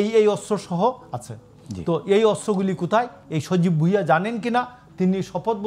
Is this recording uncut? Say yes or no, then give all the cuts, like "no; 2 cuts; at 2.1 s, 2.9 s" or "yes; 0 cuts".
yes; 0 cuts